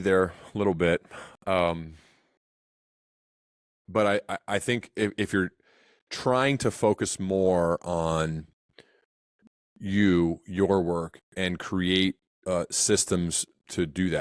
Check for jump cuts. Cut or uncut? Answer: uncut